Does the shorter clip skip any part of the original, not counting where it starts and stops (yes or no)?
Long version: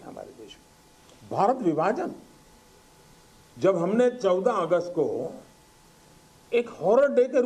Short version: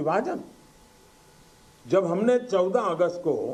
no